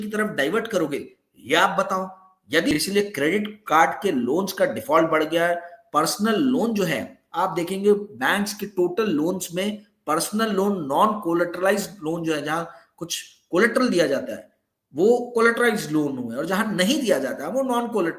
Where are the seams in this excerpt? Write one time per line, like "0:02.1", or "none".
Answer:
0:02.7